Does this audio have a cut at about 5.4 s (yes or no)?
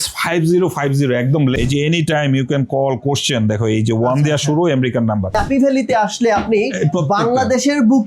yes